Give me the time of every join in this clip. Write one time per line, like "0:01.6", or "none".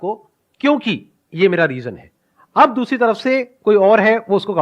none